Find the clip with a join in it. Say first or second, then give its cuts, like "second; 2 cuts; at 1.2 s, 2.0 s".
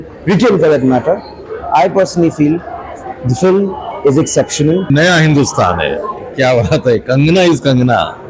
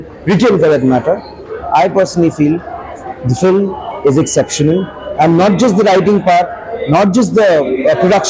first; 1 cut; at 4.9 s